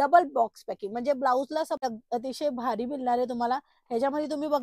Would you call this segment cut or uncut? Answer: cut